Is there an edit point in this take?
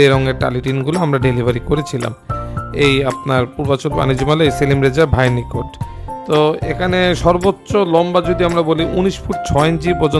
no; 0 cuts

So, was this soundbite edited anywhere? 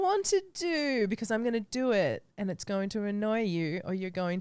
no; 0 cuts

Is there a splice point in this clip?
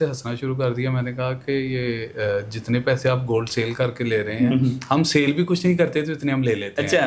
no; 0 cuts

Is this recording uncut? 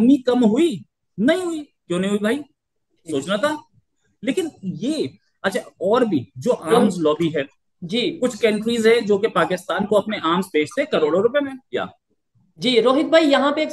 yes; 0 cuts

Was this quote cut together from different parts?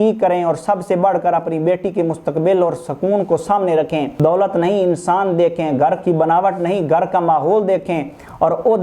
yes; 1 cut; at 4.1 s

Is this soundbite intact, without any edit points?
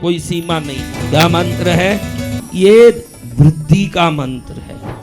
no; 2 cuts; at 0.9 s, 2.4 s

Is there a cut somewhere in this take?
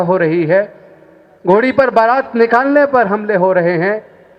no; 0 cuts

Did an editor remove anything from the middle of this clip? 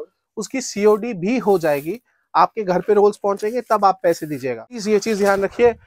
yes; 1 cut; at 4.7 s

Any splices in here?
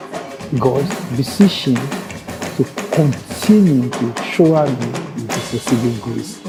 no; 0 cuts

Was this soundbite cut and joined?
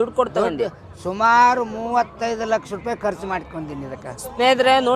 no; 0 cuts

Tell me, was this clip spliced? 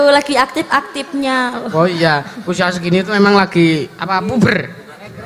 no; 0 cuts

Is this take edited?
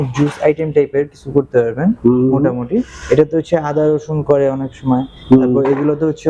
no; 0 cuts

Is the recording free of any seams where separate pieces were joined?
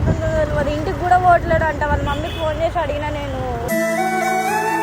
yes; 0 cuts

